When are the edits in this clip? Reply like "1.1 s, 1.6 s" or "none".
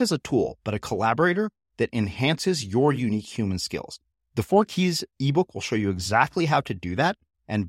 none